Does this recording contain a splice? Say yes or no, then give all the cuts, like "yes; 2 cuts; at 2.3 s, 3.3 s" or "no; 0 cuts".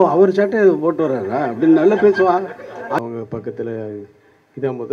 yes; 1 cut; at 3.0 s